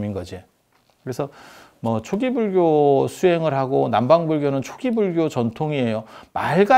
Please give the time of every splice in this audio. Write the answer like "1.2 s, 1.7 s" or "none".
none